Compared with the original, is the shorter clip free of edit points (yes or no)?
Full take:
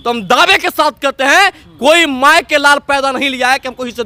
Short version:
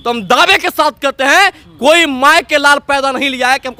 yes